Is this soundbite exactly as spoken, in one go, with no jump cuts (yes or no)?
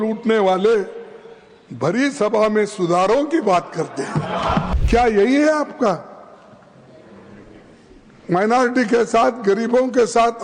no